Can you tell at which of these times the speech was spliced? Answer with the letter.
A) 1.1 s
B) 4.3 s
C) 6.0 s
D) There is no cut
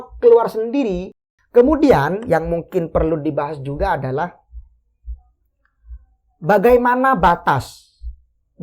A